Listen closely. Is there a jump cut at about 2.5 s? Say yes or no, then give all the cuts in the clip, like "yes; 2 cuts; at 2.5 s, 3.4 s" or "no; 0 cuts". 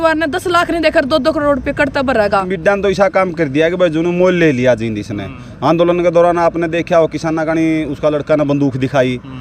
yes; 1 cut; at 2.5 s